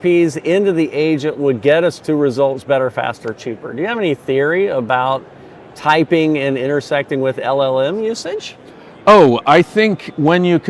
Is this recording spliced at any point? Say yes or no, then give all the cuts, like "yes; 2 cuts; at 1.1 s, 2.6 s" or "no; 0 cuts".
no; 0 cuts